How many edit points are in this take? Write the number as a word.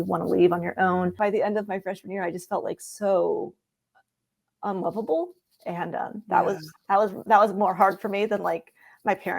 one